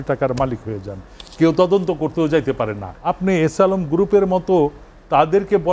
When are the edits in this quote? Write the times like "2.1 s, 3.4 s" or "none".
2.9 s